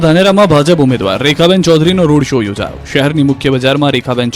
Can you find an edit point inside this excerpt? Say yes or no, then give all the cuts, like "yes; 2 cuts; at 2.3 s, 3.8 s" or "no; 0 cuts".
no; 0 cuts